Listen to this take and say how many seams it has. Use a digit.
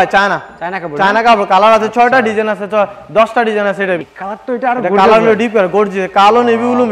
1